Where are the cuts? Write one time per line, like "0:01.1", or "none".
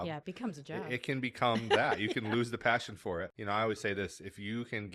0:03.3

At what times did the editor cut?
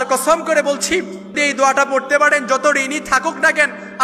0:01.4

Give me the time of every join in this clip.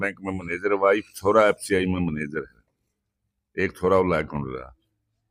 none

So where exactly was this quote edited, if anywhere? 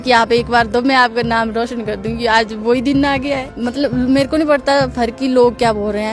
0:03.5

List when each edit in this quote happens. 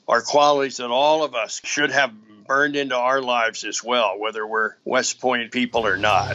0:01.6
0:04.8
0:05.5

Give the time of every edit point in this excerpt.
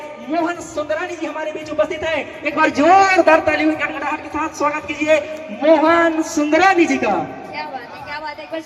none

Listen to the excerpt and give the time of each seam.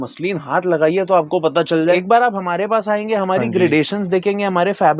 0:02.0

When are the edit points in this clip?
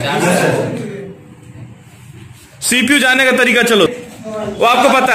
0:03.9

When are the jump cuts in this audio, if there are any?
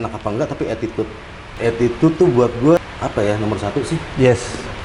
0:01.4
0:02.8

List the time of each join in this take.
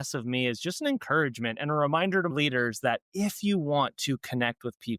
0:02.3

